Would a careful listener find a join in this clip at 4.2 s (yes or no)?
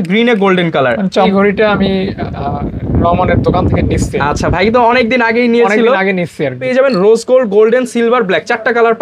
no